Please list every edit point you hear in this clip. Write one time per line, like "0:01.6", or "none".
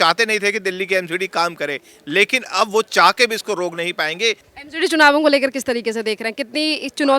0:04.5

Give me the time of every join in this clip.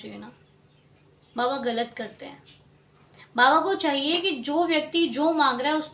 none

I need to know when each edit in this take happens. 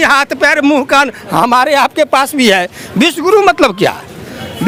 none

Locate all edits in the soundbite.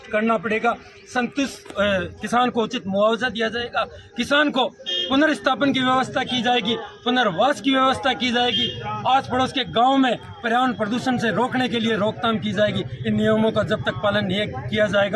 none

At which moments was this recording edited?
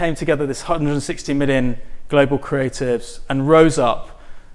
none

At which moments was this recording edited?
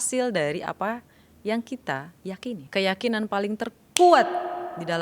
0:02.6

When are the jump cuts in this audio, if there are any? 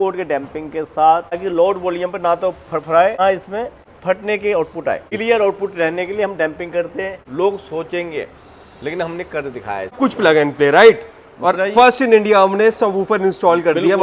0:01.4
0:03.3
0:05.1
0:07.2
0:10.0

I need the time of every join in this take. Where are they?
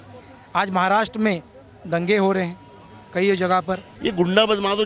0:03.8

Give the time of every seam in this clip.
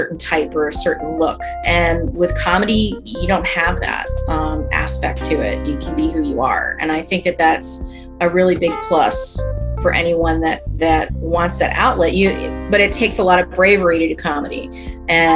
0:01.6

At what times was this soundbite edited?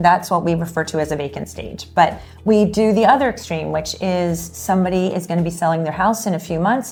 none

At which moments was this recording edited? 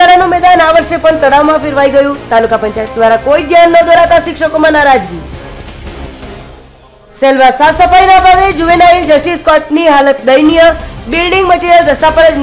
none

